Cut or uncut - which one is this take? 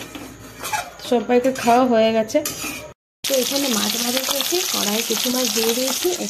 cut